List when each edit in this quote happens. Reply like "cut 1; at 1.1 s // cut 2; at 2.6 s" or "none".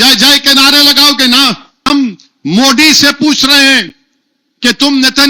cut 1; at 1.8 s